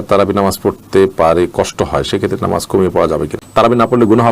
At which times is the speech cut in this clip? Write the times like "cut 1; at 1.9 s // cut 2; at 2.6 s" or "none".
cut 1; at 3.4 s